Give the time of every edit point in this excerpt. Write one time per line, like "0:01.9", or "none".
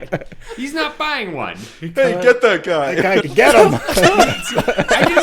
0:03.3